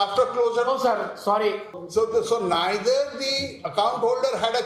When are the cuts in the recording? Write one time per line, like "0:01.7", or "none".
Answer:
0:01.8